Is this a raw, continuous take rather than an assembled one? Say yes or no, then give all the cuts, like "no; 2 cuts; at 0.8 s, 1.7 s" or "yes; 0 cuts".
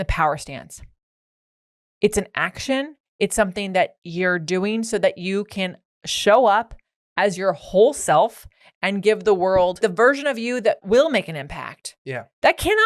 no; 2 cuts; at 9.8 s, 10.8 s